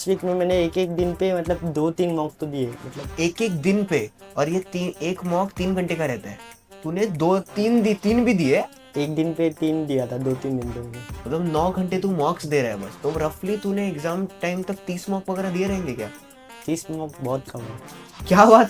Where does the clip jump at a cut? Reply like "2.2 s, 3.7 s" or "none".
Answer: none

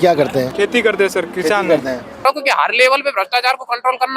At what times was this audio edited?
2.2 s

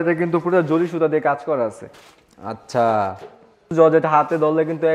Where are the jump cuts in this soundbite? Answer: 3.7 s

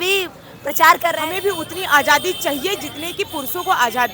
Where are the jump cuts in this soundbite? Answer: 1.2 s

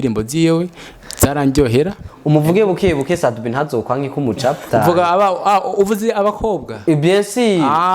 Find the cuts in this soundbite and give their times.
4.6 s

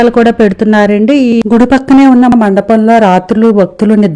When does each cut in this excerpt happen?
1.4 s

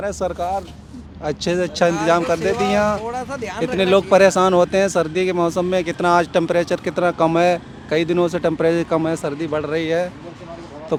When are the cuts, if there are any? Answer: none

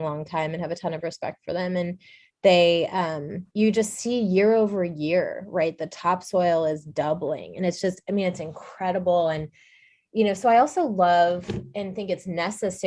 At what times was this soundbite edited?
3.4 s

